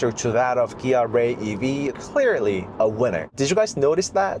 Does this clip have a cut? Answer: yes; 2 cuts; at 1.9 s, 3.3 s

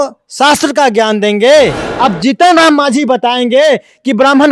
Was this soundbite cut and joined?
yes; 1 cut; at 1.8 s

